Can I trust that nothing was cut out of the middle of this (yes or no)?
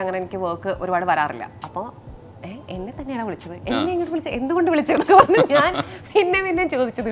yes